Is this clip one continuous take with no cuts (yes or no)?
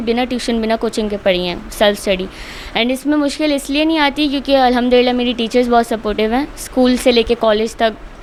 yes